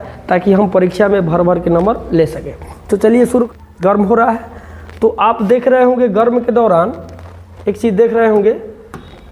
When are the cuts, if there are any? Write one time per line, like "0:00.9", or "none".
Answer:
0:03.5